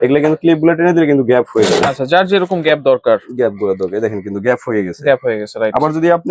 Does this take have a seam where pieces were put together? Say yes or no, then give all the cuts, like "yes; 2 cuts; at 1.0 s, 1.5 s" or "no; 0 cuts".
no; 0 cuts